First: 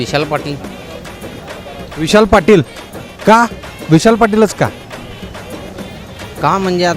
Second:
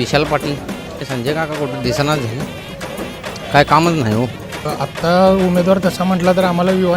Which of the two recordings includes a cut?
second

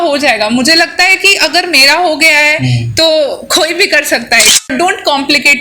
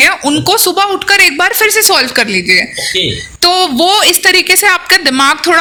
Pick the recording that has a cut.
first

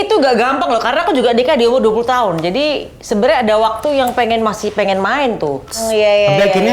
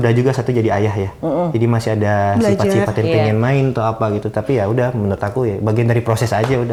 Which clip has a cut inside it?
first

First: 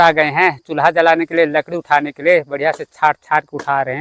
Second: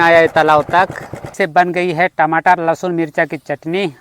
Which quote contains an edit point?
second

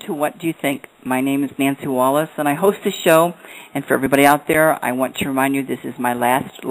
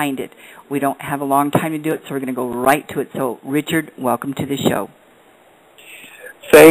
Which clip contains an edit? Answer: second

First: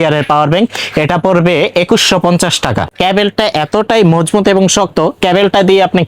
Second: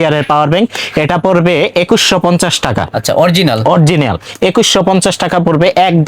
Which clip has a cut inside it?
first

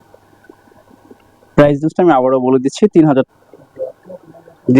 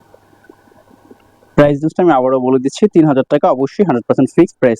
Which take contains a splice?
first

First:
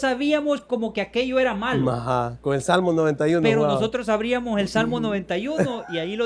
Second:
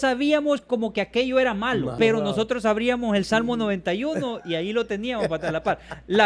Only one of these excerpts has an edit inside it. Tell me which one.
second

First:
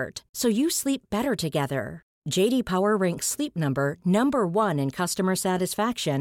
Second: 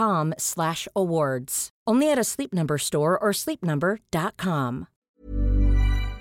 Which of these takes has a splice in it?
second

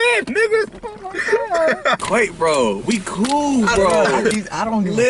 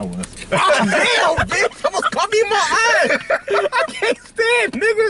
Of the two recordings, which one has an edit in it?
first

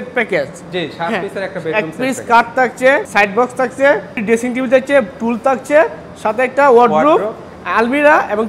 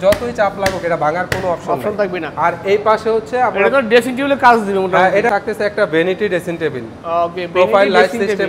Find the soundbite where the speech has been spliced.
second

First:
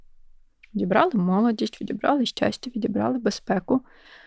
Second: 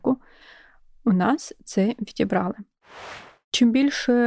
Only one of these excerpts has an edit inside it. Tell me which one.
second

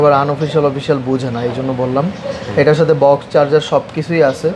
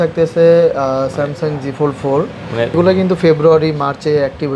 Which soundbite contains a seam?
second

